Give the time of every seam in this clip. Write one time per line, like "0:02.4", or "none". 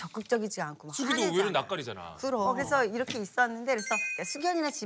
0:02.5